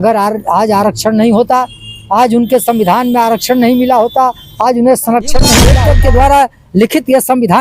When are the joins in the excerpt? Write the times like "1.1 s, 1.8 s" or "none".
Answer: 5.7 s